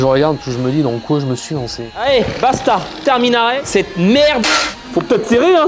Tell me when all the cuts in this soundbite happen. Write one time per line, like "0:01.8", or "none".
0:01.9